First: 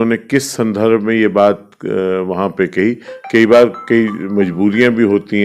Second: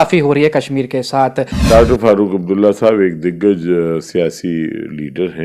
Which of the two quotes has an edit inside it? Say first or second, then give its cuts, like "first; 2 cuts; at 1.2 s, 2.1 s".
second; 1 cut; at 1.5 s